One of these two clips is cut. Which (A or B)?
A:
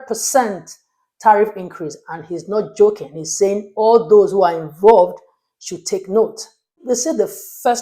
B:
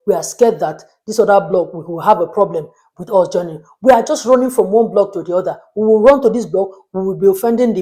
A